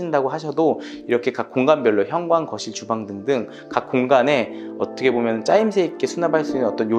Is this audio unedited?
yes; 0 cuts

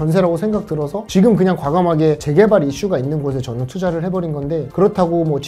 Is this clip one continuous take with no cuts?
yes; 0 cuts

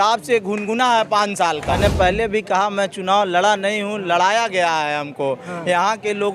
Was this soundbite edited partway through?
yes; 1 cut; at 1.6 s

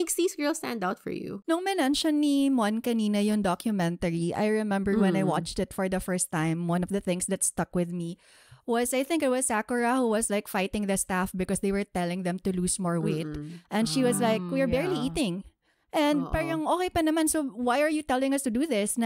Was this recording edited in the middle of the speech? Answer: yes; 1 cut; at 1.3 s

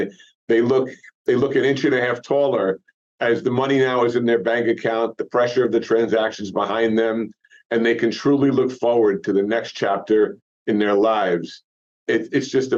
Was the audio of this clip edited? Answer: no; 0 cuts

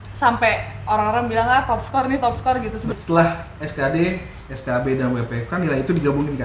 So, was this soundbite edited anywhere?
yes; 1 cut; at 2.9 s

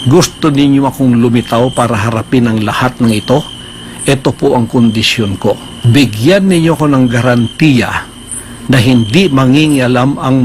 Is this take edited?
yes; 1 cut; at 5.7 s

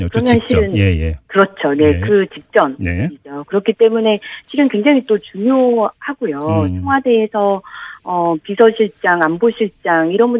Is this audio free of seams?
no; 1 cut; at 1.6 s

